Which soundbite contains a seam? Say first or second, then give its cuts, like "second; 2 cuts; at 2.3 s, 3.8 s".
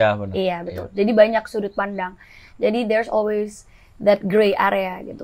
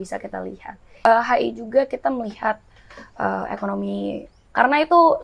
second; 1 cut; at 1.0 s